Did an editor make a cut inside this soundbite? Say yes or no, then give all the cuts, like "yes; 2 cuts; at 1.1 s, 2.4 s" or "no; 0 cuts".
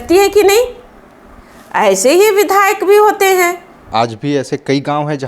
yes; 1 cut; at 3.7 s